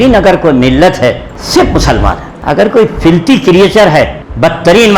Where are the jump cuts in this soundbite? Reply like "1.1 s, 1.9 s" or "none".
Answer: 2.4 s

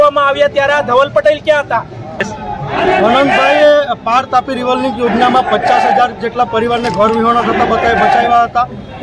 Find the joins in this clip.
2.2 s

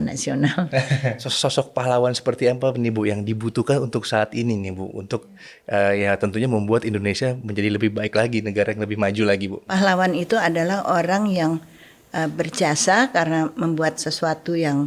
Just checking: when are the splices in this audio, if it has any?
1.2 s, 9.7 s

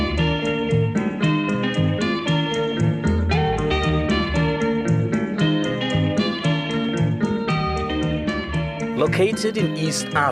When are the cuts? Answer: 1.1 s

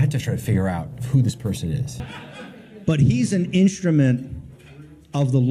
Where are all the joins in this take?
2.0 s

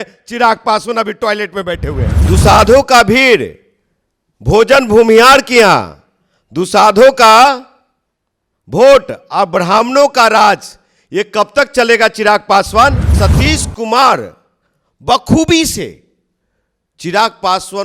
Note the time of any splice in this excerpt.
2.2 s, 13.1 s

